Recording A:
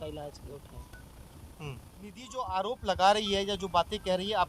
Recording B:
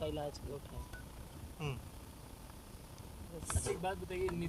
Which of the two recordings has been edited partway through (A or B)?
A